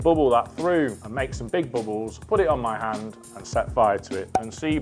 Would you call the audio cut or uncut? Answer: cut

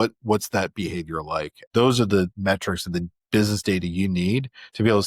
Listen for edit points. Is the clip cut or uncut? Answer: cut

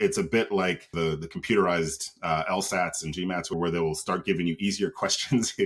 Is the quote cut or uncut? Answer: cut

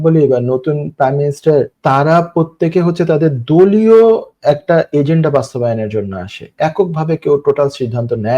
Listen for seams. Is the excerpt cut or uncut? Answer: cut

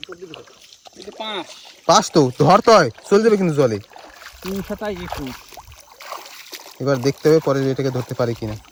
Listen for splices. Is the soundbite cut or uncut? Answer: uncut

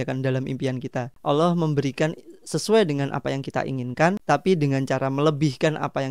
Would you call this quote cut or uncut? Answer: cut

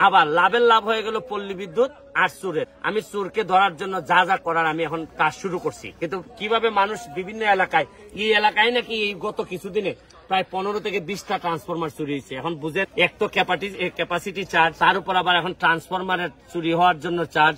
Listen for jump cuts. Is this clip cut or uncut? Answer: uncut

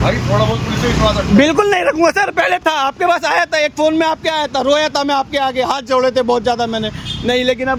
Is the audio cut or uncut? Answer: uncut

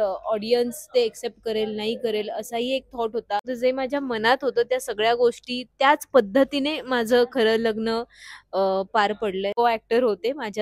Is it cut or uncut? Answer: cut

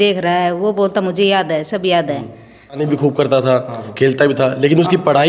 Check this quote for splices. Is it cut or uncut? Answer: cut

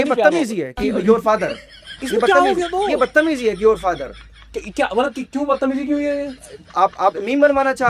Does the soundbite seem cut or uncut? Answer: uncut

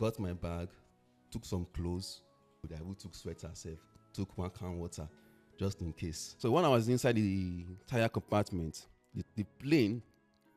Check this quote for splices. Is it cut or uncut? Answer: cut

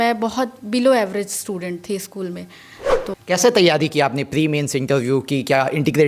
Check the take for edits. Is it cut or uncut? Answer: cut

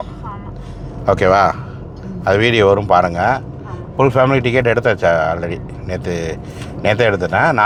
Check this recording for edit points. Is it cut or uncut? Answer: uncut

